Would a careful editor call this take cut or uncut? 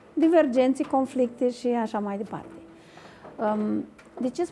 uncut